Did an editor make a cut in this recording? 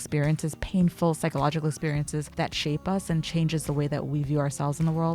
yes; 1 cut; at 2.3 s

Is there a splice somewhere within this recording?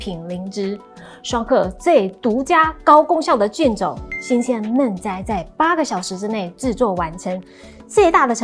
no; 0 cuts

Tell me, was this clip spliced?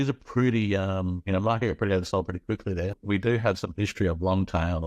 yes; 1 cut; at 3.0 s

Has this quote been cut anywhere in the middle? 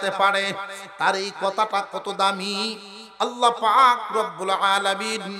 no; 0 cuts

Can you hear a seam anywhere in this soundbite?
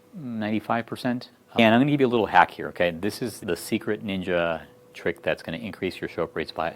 yes; 1 cut; at 1.6 s

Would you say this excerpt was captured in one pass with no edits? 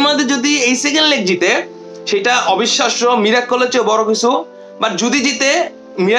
yes; 0 cuts

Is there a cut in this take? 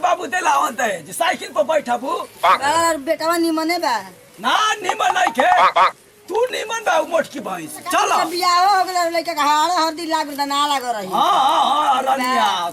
yes; 1 cut; at 8.2 s

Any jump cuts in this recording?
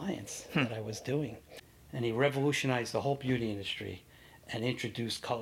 yes; 1 cut; at 1.4 s

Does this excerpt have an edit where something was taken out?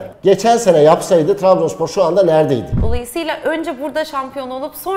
yes; 1 cut; at 2.8 s

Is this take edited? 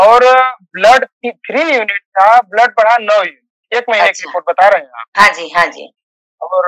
no; 0 cuts

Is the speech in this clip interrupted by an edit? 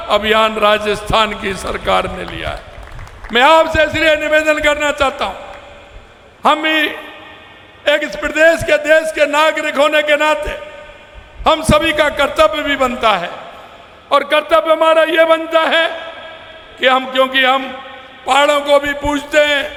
no; 0 cuts

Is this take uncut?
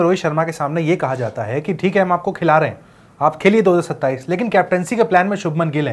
yes; 0 cuts

